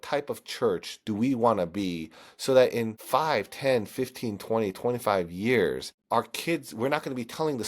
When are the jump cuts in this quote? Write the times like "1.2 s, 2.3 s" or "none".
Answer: 3.0 s, 5.9 s